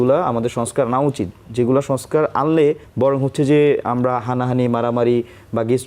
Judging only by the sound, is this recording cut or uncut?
cut